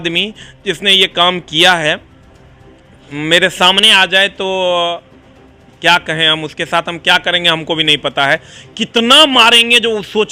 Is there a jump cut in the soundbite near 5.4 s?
no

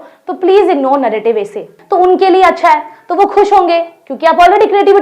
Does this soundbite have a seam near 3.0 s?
no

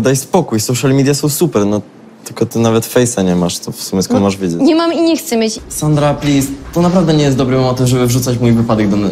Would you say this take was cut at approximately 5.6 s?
yes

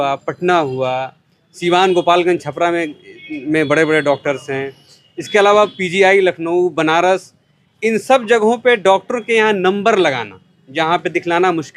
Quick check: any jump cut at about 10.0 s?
no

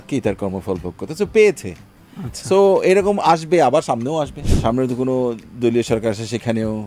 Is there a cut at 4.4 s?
yes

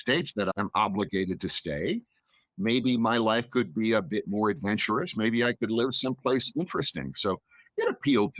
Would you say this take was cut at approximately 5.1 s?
no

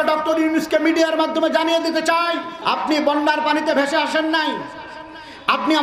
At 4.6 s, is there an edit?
no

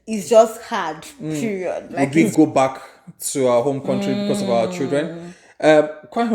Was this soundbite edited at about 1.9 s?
yes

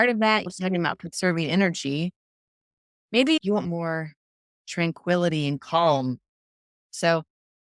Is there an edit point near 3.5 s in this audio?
yes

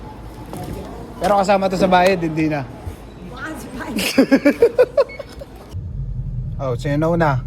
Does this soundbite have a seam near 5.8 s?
yes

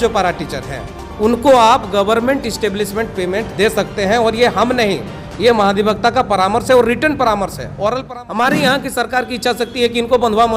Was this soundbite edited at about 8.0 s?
yes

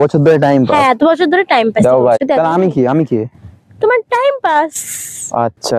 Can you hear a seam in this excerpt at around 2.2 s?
yes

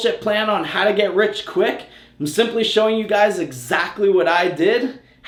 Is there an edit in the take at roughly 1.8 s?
no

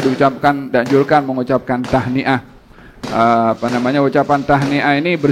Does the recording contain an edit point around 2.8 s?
no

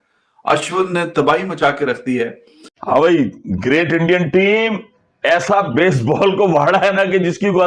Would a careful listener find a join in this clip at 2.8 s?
yes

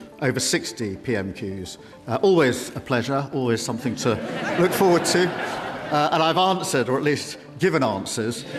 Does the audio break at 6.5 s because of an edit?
no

